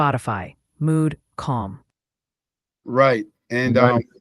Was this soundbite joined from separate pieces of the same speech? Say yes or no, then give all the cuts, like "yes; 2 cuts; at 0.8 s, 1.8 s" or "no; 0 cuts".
no; 0 cuts